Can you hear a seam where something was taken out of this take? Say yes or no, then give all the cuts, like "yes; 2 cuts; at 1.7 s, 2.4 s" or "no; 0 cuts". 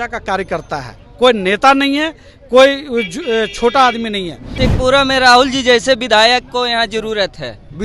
yes; 1 cut; at 4.5 s